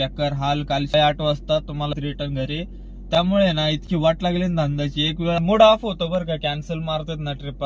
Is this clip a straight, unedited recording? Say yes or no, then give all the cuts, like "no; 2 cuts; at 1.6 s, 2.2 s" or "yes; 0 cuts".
no; 3 cuts; at 0.9 s, 2.0 s, 5.4 s